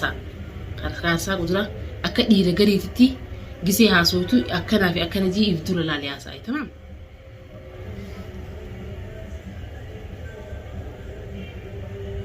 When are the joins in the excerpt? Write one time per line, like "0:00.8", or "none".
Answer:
0:07.0